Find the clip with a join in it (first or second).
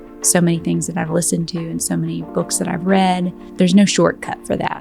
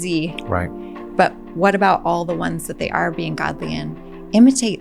first